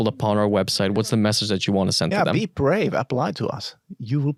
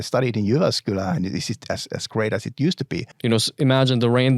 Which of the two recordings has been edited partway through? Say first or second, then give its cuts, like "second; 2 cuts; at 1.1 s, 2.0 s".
second; 1 cut; at 3.1 s